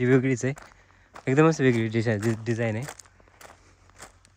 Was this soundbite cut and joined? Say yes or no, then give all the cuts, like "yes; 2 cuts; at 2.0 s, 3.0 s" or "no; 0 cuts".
no; 0 cuts